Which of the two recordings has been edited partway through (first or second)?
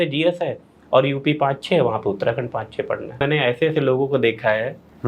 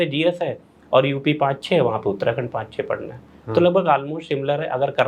first